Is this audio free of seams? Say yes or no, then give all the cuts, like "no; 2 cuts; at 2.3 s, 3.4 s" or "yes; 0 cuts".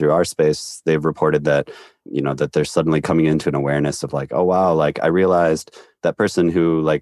yes; 0 cuts